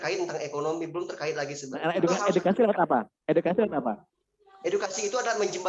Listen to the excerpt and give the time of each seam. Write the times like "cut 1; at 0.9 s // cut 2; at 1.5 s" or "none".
none